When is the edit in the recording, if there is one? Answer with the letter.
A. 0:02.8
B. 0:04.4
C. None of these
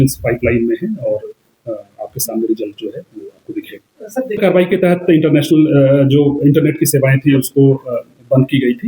B